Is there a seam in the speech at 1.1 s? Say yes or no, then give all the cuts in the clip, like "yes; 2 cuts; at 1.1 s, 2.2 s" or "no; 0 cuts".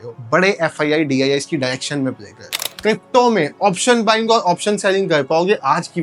no; 1 cut; at 2.7 s